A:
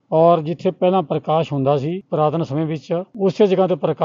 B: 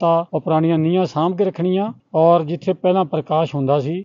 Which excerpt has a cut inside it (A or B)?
A